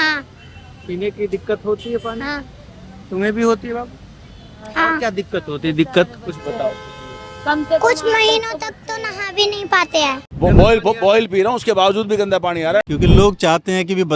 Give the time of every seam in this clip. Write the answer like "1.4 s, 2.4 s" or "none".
10.2 s, 12.9 s